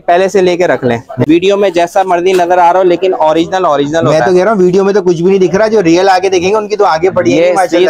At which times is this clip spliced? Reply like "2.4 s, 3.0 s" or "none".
1.2 s